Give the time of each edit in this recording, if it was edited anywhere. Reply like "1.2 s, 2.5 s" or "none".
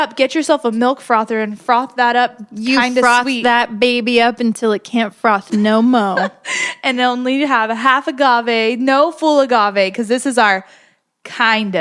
none